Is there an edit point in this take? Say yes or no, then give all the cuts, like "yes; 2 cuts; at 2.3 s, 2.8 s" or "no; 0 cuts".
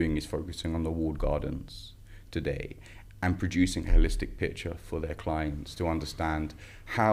no; 0 cuts